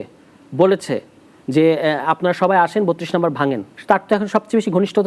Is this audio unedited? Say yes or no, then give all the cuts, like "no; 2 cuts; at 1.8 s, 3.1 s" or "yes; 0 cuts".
no; 1 cut; at 3.7 s